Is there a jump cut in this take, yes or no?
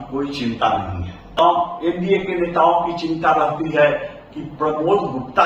yes